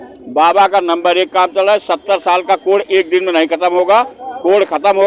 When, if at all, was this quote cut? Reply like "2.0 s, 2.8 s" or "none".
none